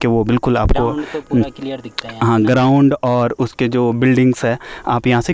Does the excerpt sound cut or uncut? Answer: uncut